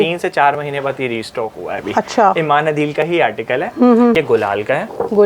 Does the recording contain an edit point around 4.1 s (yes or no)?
yes